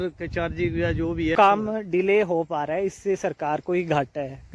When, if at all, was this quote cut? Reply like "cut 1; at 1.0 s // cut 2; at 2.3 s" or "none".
cut 1; at 1.4 s